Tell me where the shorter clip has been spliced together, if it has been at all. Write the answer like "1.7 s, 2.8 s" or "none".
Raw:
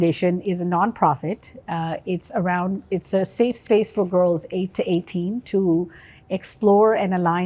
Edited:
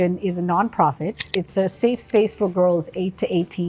1.3 s